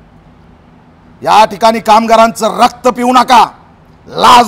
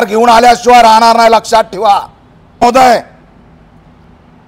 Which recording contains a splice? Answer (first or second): second